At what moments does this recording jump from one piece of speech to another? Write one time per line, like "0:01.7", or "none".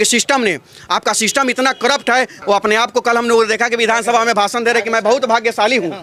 0:02.4